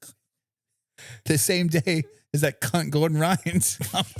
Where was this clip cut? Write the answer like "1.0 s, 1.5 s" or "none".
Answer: none